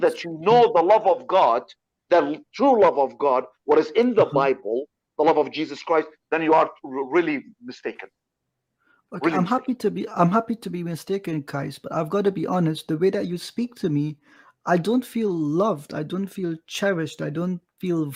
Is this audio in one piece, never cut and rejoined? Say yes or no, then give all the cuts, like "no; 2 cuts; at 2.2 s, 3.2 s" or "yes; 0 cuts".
yes; 0 cuts